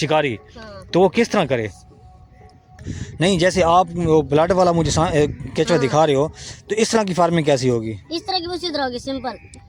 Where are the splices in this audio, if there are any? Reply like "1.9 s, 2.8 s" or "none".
2.8 s